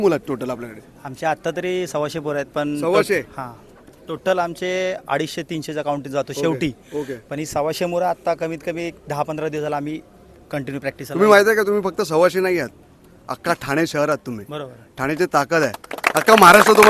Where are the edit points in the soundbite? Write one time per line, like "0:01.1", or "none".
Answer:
none